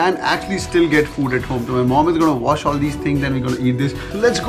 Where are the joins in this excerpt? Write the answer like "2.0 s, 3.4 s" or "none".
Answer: none